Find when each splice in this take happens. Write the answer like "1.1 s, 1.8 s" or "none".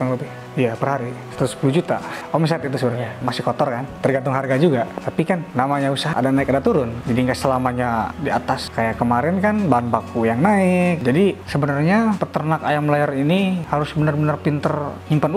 3.2 s, 7.0 s, 8.6 s

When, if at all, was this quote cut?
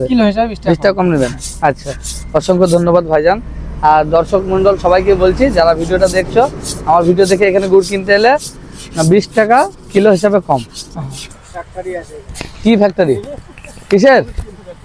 11.3 s

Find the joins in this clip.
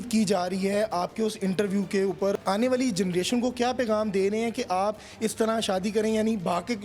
2.4 s

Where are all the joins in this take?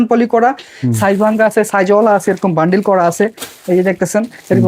none

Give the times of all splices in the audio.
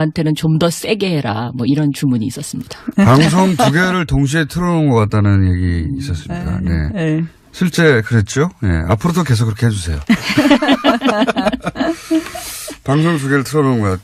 5.0 s

